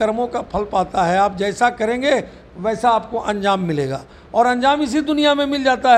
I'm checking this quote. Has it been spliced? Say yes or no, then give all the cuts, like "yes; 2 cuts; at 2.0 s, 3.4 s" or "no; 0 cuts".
no; 0 cuts